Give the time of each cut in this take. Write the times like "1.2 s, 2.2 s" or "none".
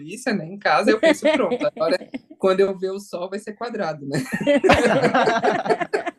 none